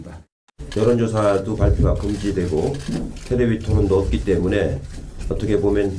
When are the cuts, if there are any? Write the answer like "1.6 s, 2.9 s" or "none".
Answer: 4.9 s